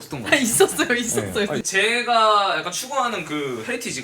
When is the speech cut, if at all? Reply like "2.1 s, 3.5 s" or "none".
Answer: 1.6 s